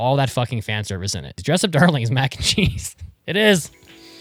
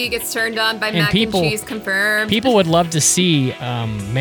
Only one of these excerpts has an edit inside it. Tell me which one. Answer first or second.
first